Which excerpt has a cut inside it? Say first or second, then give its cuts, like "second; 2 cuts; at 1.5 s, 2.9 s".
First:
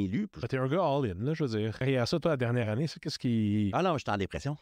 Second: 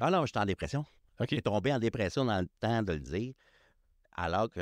first; 1 cut; at 1.8 s